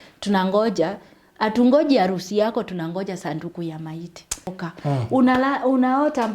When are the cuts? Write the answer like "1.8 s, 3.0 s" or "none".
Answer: 4.6 s